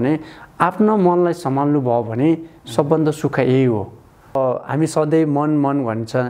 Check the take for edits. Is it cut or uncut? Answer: cut